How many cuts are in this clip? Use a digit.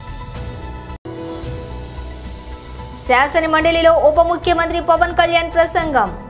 0